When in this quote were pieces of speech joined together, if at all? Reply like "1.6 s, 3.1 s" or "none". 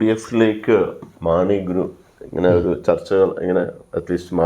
1.1 s